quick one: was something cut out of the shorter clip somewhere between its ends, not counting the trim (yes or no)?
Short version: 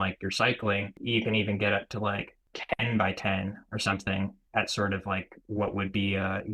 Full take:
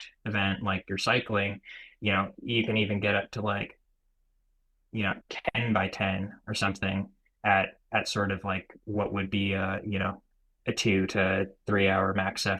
yes